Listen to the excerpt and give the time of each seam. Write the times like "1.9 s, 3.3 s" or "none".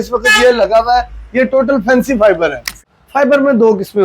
2.7 s